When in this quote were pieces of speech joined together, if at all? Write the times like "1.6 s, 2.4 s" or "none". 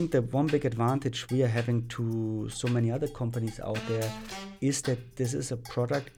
none